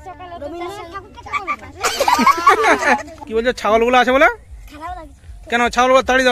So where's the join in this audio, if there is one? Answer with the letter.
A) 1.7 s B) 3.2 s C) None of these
B